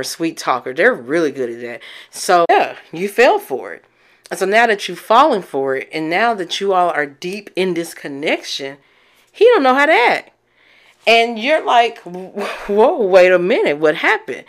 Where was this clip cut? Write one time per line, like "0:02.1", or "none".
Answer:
0:02.5